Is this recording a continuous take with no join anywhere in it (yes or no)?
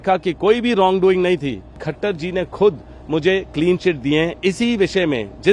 no